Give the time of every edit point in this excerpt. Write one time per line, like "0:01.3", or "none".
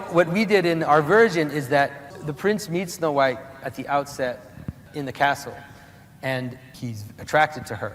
0:02.2
0:04.8
0:06.7